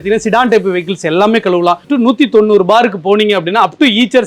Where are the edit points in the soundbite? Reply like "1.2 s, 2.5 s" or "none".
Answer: 1.9 s